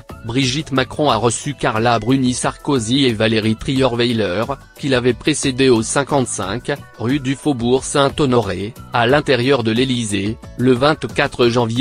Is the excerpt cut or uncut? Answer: uncut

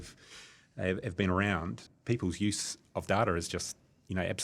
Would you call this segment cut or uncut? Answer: cut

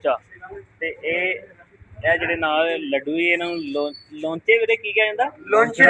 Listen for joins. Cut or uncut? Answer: uncut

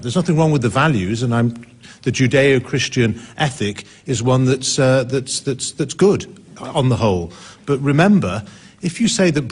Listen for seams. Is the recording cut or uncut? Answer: uncut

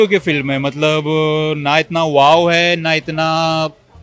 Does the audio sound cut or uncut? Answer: uncut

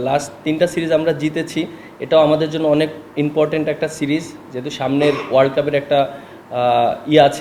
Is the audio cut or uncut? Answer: uncut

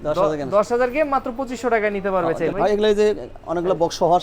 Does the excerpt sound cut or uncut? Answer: cut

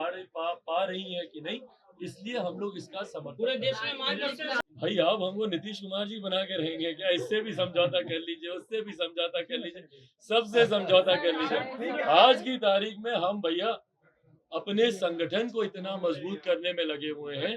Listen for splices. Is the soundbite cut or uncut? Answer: cut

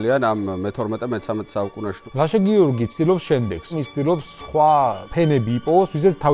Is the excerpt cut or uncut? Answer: cut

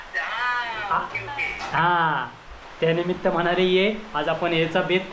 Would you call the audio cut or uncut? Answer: cut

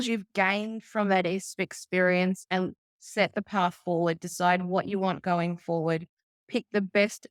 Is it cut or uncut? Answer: uncut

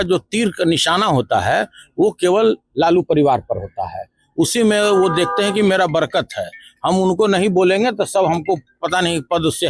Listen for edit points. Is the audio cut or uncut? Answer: uncut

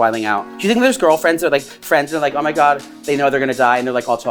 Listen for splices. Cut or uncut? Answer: cut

